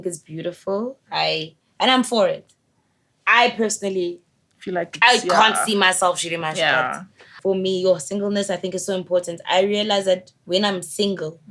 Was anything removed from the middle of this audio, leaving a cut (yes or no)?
yes